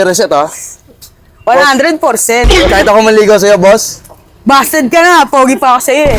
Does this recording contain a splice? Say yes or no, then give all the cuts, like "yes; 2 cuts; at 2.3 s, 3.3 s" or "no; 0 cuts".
yes; 1 cut; at 2.7 s